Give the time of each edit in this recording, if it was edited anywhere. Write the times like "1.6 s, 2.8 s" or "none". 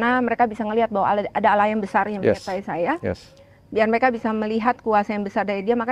none